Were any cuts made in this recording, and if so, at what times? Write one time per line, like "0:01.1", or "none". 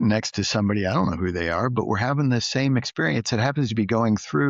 none